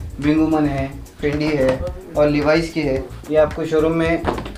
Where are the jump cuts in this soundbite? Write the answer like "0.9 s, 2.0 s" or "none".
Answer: 3.1 s